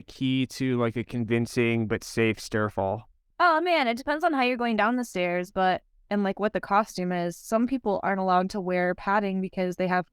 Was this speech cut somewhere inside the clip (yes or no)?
yes